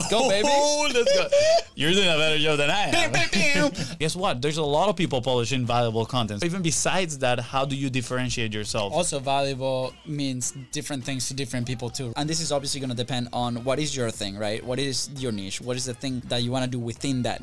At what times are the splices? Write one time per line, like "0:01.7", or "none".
0:04.0
0:06.4
0:10.0
0:12.1
0:16.2